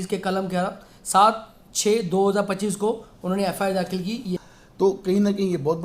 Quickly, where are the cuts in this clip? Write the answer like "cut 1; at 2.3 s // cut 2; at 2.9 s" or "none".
cut 1; at 4.3 s

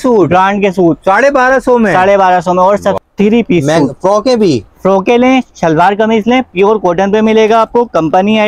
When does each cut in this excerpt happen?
cut 1; at 3.0 s

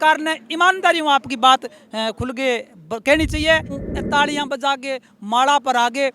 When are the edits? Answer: cut 1; at 3.8 s

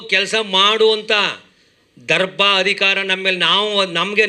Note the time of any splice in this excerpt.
none

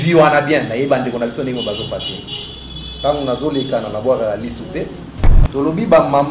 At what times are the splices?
cut 1; at 5.3 s

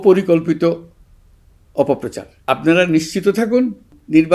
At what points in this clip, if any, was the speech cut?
cut 1; at 2.3 s

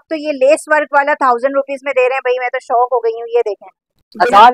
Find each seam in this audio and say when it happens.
none

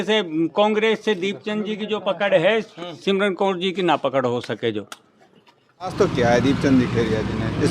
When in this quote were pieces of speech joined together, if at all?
cut 1; at 5.9 s

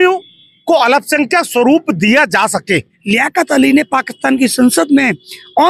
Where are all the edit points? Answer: cut 1; at 2.9 s

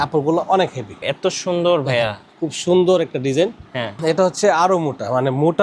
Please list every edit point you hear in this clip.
cut 1; at 1.1 s // cut 2; at 4.0 s

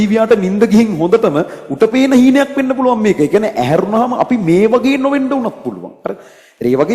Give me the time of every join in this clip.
none

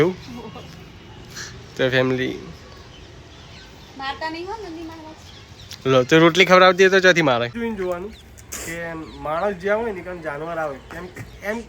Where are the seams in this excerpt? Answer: cut 1; at 7.5 s

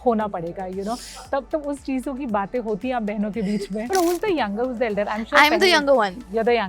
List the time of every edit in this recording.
cut 1; at 3.9 s

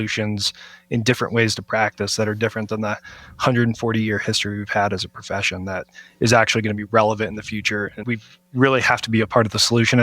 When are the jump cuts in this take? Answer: cut 1; at 8.0 s

